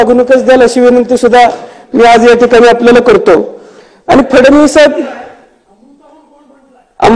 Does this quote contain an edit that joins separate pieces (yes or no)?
no